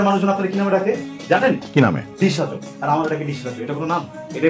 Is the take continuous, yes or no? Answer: yes